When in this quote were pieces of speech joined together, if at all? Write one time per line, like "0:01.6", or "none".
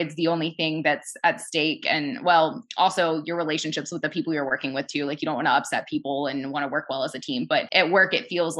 0:07.7